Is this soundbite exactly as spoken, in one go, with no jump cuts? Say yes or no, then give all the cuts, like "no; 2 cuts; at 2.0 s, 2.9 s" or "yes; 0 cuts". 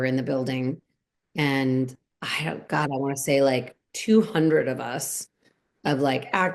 no; 1 cut; at 2.0 s